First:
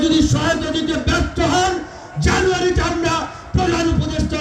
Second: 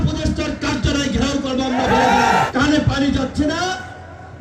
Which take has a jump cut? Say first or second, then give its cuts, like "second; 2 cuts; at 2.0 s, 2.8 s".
second; 1 cut; at 2.4 s